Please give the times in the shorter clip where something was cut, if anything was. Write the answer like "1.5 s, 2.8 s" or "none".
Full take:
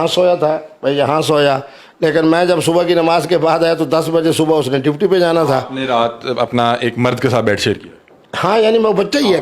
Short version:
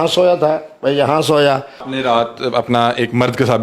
1.9 s